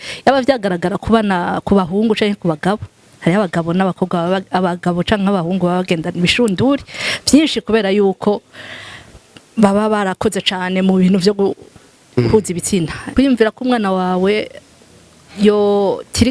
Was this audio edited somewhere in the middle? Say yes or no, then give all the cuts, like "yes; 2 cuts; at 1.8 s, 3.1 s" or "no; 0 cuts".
yes; 1 cut; at 13.0 s